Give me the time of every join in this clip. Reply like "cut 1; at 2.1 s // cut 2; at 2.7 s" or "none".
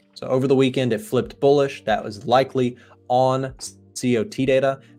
none

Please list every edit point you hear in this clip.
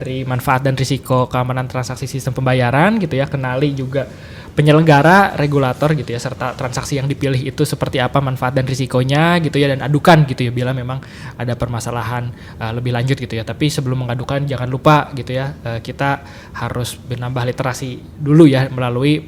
none

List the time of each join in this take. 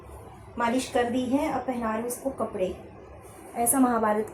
none

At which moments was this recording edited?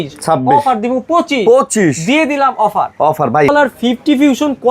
cut 1; at 3.5 s

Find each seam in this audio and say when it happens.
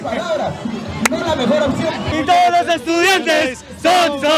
cut 1; at 2.1 s

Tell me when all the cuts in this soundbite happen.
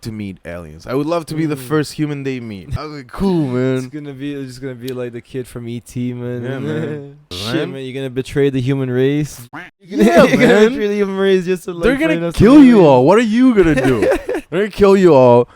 cut 1; at 2.7 s // cut 2; at 7.3 s

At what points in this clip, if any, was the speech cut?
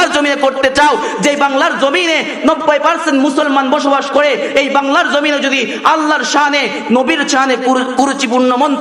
none

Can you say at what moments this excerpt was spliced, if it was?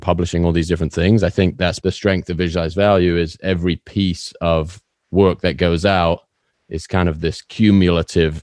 cut 1; at 1.8 s

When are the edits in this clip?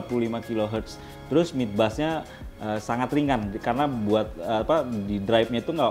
none

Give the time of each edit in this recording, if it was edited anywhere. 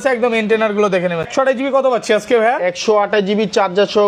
cut 1; at 1.3 s

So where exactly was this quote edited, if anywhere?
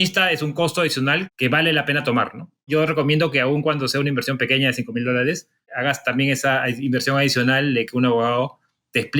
cut 1; at 1.3 s // cut 2; at 2.6 s // cut 3; at 5.7 s

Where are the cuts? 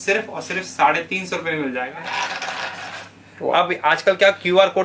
cut 1; at 1.9 s

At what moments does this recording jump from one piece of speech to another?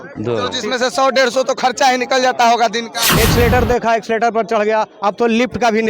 cut 1; at 3.0 s

